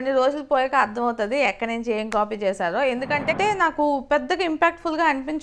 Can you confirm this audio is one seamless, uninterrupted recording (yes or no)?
no